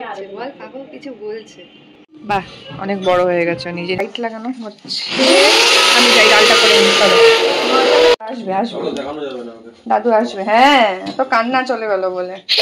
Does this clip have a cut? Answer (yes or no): yes